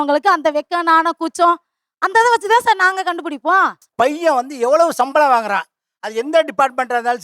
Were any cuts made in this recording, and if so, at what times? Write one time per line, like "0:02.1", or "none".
0:03.8